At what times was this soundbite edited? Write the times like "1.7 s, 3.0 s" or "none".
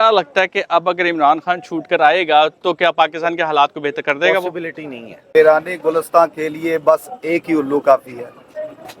5.1 s